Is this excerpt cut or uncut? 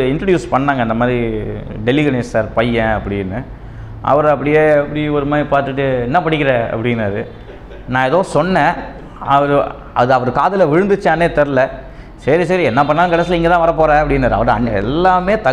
uncut